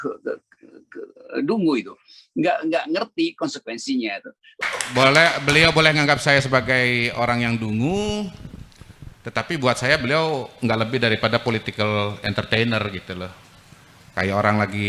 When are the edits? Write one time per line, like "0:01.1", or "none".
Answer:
0:04.6